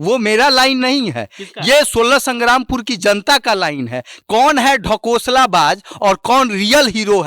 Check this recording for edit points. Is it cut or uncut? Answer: cut